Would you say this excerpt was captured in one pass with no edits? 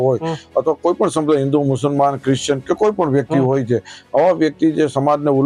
yes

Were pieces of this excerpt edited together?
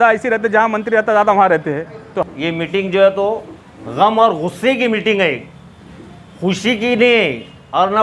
yes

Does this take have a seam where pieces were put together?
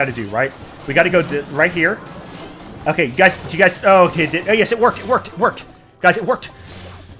no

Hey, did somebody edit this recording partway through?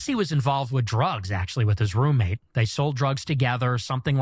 yes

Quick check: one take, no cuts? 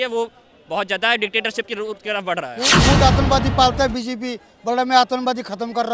no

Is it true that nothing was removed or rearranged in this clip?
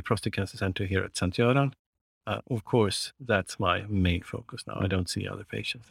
yes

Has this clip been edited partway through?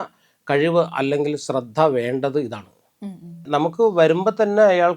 yes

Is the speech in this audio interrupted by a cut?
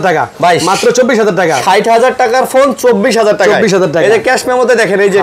no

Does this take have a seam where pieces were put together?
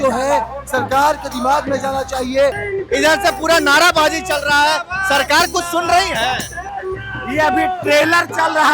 yes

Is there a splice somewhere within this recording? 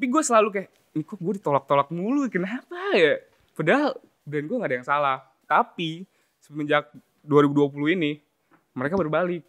no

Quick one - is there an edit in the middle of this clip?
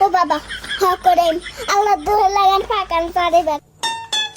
no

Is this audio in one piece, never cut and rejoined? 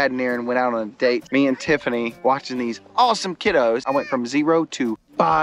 no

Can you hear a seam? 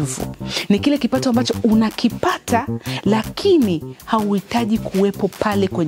no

